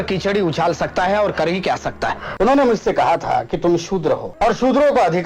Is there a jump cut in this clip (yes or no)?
yes